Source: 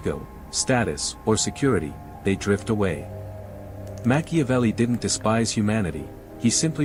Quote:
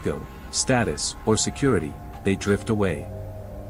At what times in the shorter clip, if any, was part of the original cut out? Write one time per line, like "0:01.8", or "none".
none